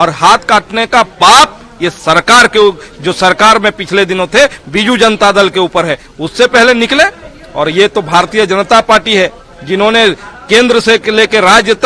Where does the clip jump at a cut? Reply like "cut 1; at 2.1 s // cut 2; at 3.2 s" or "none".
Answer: none